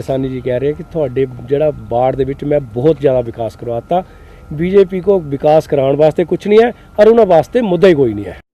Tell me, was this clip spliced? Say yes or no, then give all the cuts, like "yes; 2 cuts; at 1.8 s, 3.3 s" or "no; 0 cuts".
no; 0 cuts